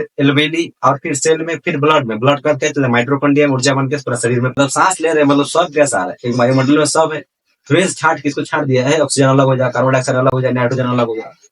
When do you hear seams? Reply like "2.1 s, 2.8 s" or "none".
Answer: 4.5 s